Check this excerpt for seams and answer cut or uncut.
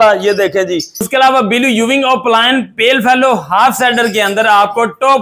cut